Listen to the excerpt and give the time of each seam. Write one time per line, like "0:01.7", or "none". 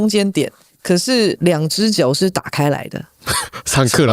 0:01.4